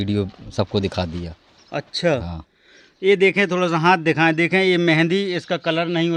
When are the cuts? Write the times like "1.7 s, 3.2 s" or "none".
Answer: none